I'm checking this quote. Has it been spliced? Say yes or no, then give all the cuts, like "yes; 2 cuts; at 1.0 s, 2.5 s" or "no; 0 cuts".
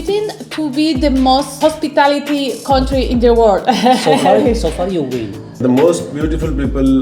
yes; 2 cuts; at 1.5 s, 5.6 s